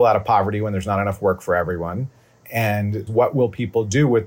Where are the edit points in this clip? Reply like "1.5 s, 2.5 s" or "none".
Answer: 3.1 s